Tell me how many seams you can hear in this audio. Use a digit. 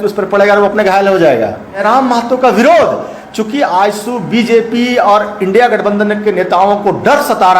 1